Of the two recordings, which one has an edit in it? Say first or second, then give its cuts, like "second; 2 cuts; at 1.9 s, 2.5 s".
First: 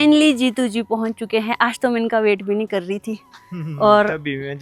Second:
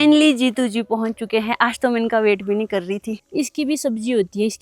second; 1 cut; at 3.2 s